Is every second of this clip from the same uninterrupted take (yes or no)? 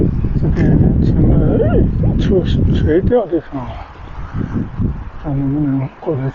yes